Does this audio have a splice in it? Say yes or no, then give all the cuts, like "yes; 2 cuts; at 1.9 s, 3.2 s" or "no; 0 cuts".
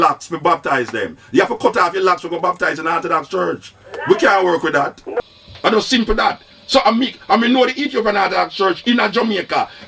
yes; 1 cut; at 5.2 s